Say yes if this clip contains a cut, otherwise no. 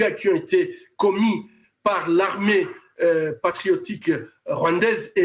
no